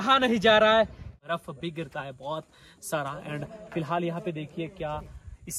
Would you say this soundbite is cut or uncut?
cut